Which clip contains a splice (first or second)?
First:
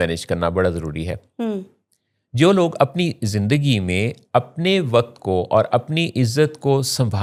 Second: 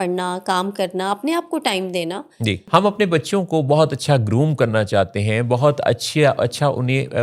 second